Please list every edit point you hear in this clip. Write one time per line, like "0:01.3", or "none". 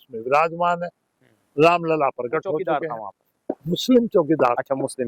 0:02.7